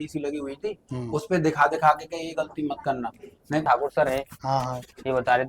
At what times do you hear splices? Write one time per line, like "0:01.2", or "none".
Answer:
0:03.6